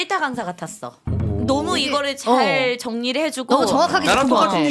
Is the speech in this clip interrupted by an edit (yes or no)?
no